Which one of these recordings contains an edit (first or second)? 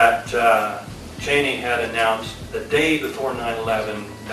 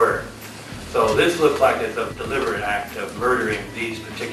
second